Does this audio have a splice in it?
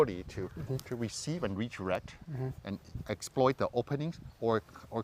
no; 0 cuts

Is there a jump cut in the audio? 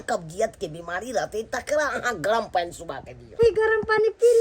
yes; 1 cut; at 3.4 s

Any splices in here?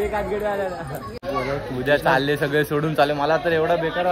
yes; 1 cut; at 1.2 s

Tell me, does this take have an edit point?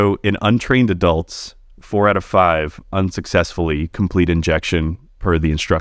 no; 0 cuts

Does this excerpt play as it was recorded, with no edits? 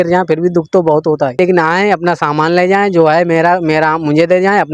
no; 1 cut; at 1.4 s

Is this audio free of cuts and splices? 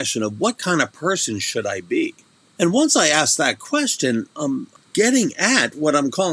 no; 2 cuts; at 2.4 s, 4.7 s

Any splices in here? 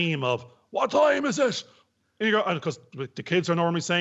no; 0 cuts

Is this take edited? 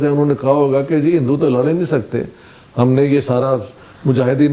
no; 0 cuts

